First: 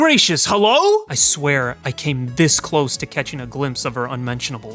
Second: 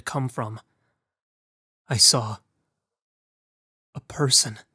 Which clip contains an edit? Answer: first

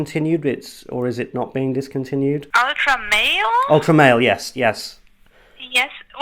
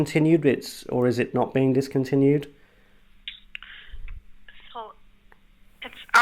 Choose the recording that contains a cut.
first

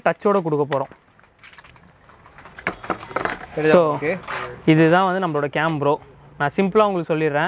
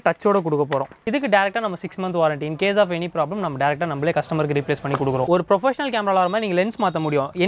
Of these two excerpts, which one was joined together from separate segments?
second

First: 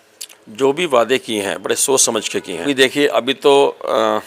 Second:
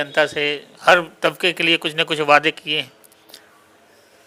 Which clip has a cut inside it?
first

